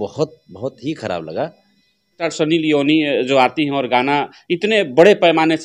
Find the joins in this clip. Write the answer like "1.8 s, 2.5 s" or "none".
2.2 s

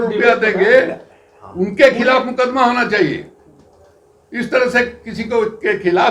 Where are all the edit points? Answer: none

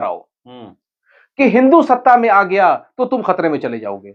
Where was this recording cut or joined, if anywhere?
none

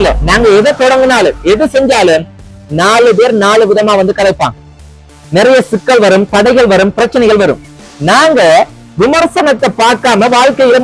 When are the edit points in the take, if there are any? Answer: none

